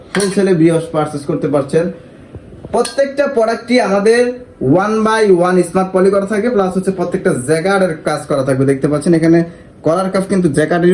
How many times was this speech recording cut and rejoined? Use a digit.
0